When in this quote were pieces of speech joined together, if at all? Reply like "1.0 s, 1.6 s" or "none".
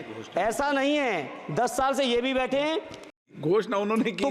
3.3 s